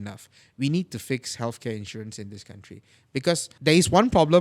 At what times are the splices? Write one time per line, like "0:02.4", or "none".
0:03.5